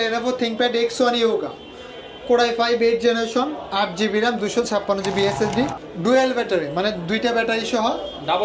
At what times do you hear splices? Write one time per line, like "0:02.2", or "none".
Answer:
0:05.8